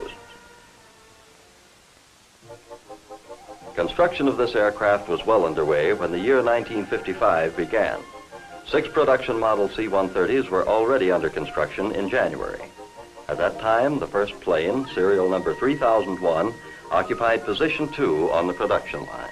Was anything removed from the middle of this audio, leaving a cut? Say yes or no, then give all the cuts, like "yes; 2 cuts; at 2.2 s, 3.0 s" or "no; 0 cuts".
no; 0 cuts